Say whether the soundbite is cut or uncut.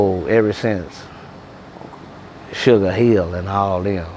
uncut